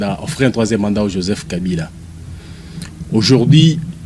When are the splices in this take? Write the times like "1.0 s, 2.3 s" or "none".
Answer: none